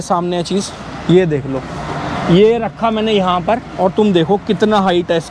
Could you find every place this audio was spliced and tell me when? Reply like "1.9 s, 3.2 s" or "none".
none